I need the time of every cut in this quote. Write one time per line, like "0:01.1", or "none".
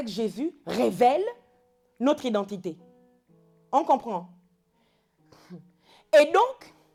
none